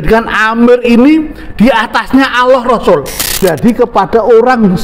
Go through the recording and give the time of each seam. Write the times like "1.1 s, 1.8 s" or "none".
3.2 s